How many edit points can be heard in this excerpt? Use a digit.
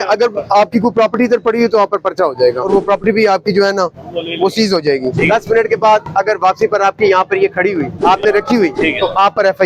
4